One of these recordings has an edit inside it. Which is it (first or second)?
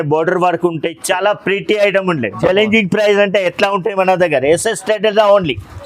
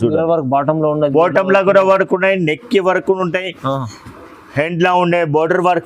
first